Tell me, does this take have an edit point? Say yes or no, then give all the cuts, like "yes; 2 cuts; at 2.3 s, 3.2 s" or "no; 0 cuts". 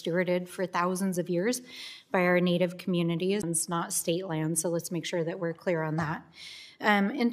no; 0 cuts